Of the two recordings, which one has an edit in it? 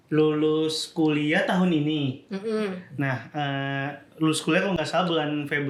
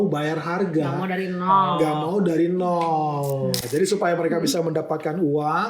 second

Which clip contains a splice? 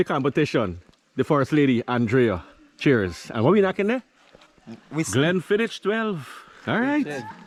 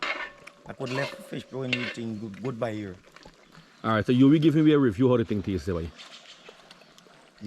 second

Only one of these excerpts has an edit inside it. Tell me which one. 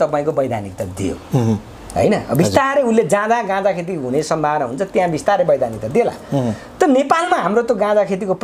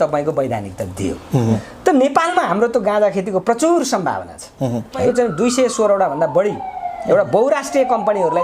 second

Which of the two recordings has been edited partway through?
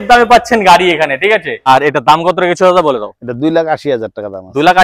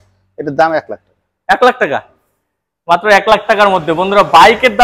first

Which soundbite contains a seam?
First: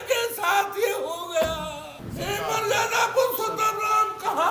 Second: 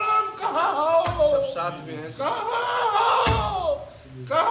first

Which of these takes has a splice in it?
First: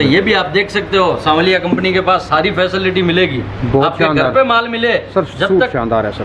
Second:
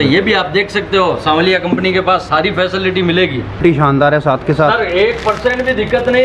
second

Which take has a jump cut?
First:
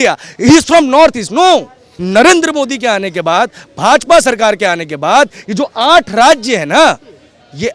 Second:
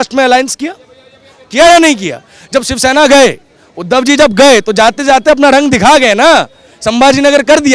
first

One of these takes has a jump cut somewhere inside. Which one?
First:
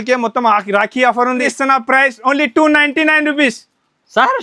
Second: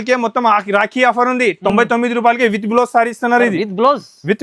first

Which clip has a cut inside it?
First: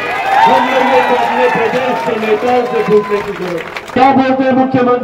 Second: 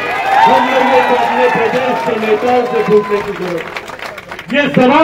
first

